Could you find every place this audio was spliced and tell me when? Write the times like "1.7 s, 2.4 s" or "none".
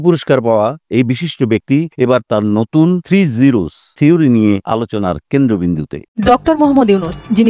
1.7 s, 3.0 s, 3.8 s, 4.6 s, 6.0 s